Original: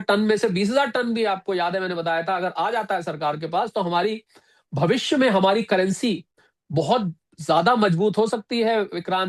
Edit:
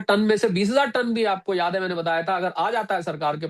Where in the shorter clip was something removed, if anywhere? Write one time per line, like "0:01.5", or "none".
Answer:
none

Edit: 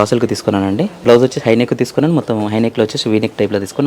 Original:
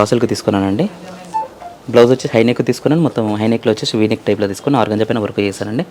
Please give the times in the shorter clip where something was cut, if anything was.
0:00.9

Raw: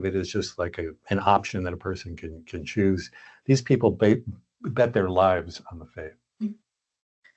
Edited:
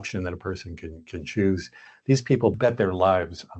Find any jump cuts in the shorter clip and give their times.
0:02.6

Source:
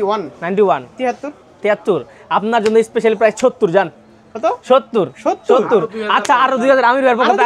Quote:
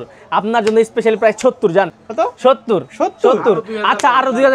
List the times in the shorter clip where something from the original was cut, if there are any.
0:02.0

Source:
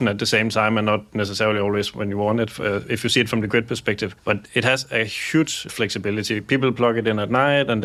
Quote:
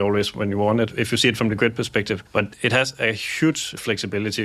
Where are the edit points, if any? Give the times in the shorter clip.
0:00.9

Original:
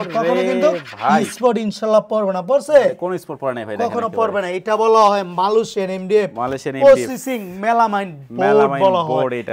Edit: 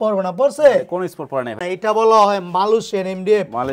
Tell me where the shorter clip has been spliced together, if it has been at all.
0:01.6

